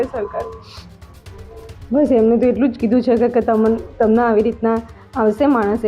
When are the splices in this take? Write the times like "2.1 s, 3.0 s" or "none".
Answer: 1.5 s